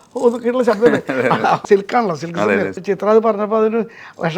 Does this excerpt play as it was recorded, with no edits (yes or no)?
no